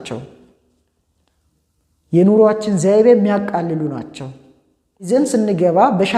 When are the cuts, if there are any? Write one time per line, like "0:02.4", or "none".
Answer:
0:05.1